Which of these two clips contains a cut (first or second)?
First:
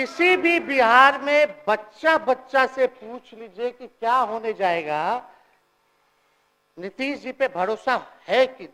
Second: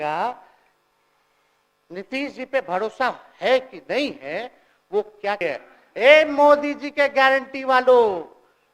second